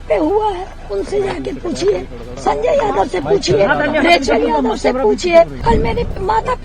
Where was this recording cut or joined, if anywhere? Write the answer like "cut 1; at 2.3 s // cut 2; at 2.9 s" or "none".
cut 1; at 5.6 s